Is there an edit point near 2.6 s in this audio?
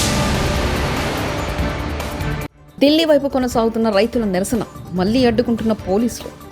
yes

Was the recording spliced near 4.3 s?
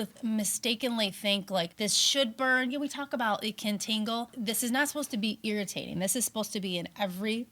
yes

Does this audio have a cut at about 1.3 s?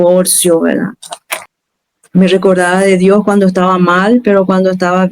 yes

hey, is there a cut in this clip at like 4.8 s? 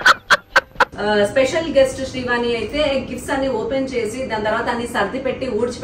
no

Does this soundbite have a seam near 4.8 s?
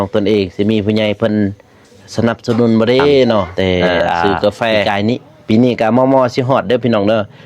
yes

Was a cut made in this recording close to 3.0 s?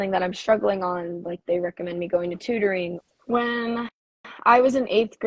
yes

